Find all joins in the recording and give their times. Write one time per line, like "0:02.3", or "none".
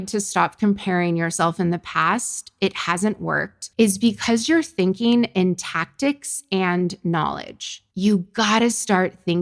none